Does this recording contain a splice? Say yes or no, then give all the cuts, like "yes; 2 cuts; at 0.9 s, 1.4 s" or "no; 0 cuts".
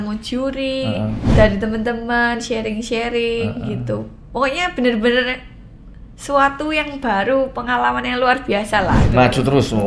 yes; 2 cuts; at 1.3 s, 9.0 s